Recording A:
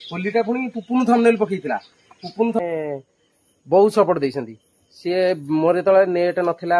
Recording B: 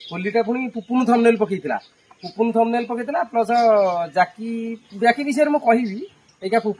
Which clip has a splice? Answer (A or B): A